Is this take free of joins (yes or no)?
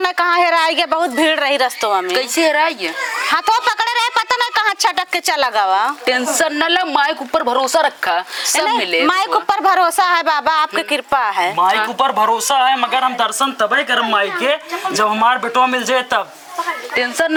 yes